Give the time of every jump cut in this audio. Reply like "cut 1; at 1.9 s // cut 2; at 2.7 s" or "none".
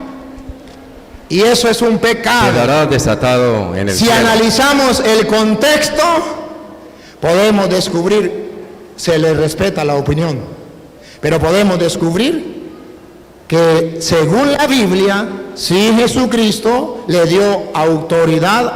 cut 1; at 2.5 s